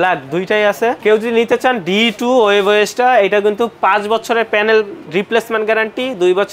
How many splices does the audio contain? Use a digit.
1